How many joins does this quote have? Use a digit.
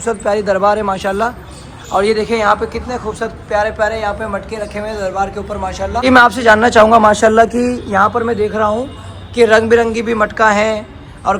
1